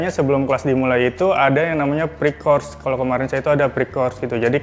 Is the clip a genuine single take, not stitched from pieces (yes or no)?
yes